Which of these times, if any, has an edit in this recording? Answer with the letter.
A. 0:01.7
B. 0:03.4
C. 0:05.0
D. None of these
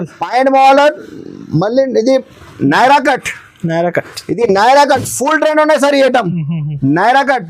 D